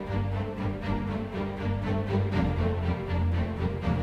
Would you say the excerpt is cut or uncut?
uncut